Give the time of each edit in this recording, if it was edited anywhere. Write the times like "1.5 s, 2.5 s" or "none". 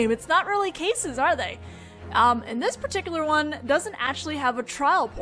3.1 s